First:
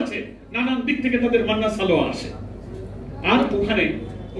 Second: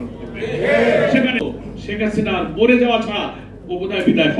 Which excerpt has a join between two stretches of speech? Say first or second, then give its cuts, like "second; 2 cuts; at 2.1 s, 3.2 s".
second; 1 cut; at 1.4 s